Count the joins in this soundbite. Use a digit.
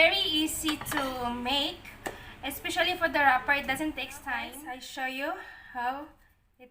1